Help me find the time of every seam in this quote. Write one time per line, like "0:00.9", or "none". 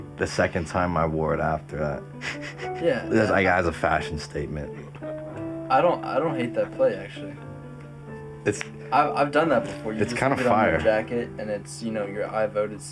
none